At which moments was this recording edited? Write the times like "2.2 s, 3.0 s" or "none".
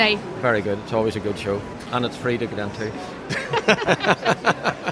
1.7 s